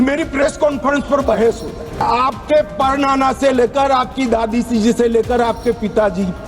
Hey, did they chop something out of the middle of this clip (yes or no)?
yes